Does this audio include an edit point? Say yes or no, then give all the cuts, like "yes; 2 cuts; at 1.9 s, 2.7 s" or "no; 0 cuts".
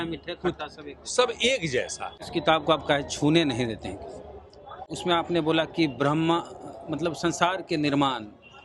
yes; 2 cuts; at 2.1 s, 4.9 s